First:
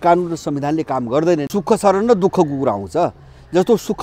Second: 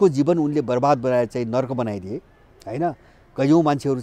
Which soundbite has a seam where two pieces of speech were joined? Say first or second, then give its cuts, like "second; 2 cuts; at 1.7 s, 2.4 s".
first; 1 cut; at 1.4 s